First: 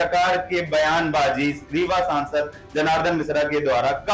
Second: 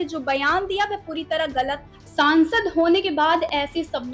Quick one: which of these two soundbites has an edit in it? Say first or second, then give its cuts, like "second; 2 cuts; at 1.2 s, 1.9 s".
second; 1 cut; at 2.1 s